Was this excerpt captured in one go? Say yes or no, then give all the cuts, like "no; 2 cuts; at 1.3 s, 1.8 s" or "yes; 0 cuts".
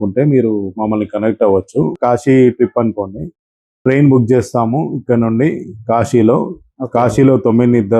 no; 1 cut; at 2.0 s